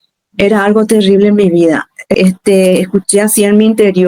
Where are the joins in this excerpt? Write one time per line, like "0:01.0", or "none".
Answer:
0:02.2